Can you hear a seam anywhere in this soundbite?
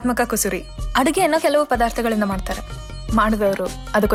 no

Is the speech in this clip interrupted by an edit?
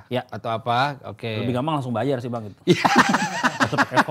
no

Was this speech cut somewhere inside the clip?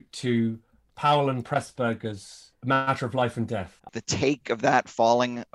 yes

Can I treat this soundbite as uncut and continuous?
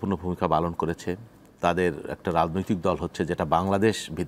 yes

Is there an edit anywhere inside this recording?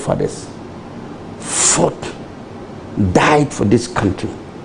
no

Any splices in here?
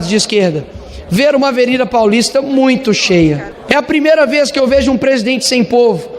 yes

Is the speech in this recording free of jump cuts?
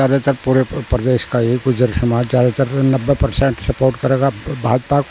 yes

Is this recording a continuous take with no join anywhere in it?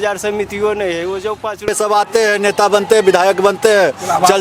no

